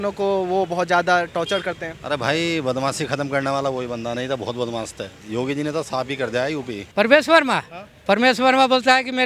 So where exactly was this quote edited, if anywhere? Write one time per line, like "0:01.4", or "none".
0:05.1
0:06.8